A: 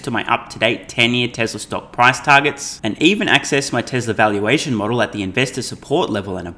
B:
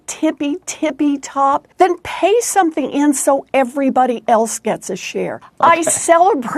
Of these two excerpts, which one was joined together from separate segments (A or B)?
B